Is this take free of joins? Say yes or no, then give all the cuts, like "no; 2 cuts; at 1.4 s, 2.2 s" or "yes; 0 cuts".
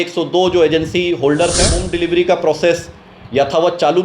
no; 1 cut; at 1.8 s